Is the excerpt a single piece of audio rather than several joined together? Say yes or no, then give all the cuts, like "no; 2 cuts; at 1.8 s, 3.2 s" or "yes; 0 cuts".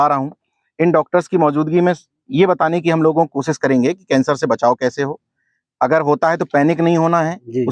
yes; 0 cuts